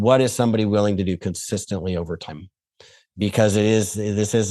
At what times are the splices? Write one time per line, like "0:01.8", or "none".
none